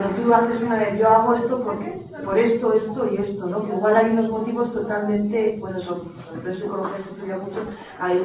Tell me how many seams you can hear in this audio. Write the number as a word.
one